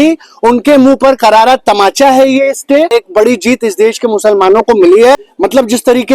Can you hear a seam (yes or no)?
yes